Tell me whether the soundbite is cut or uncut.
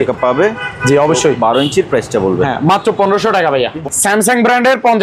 cut